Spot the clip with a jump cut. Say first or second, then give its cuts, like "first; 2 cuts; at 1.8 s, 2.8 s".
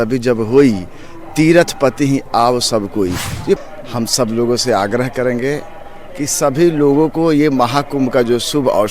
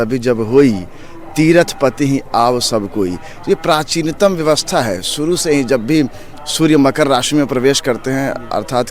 first; 1 cut; at 3.6 s